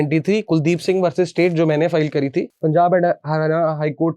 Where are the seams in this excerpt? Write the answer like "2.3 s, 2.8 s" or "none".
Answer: 2.5 s